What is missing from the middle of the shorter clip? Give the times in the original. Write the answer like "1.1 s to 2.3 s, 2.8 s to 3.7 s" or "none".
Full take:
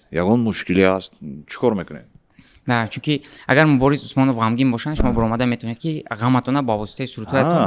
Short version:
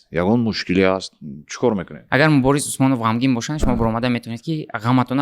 2.0 s to 3.3 s